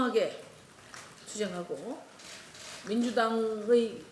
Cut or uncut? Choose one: uncut